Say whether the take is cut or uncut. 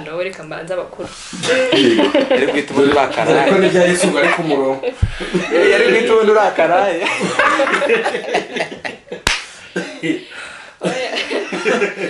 uncut